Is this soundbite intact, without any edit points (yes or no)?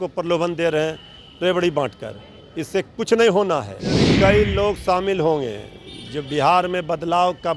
no